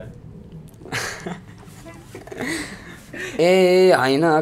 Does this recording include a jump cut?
yes; 1 cut; at 3.3 s

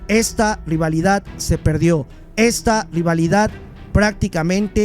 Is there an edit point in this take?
no; 0 cuts

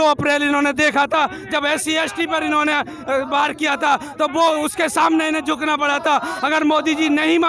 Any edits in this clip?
no; 0 cuts

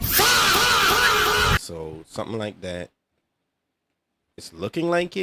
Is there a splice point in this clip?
yes; 1 cut; at 1.6 s

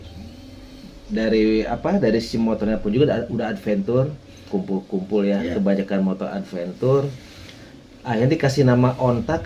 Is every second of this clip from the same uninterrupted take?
no; 1 cut; at 4.4 s

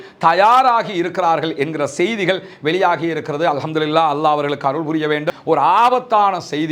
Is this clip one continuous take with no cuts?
no; 1 cut; at 5.3 s

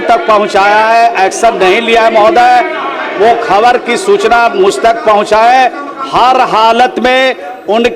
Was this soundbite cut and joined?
no; 0 cuts

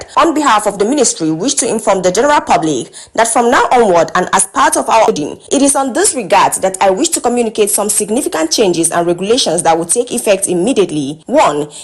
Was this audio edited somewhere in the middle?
yes; 1 cut; at 5.1 s

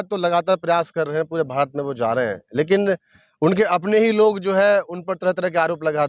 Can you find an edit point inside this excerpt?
no; 0 cuts

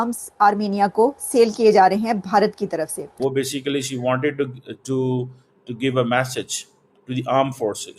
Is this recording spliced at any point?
yes; 1 cut; at 3.1 s

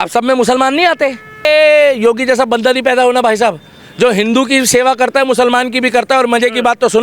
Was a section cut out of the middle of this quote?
yes; 1 cut; at 1.4 s

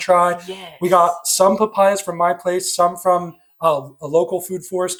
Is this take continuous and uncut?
yes; 0 cuts

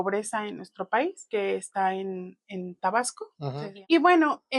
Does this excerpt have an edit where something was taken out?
yes; 1 cut; at 3.6 s

